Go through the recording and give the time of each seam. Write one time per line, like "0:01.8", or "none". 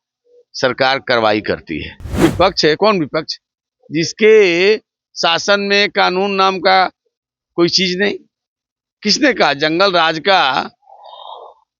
0:02.2